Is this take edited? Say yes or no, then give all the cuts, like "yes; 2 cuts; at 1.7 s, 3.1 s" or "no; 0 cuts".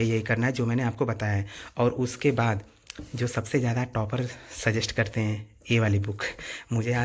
no; 0 cuts